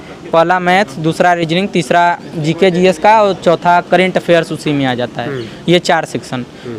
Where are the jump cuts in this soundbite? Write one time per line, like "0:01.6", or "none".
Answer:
none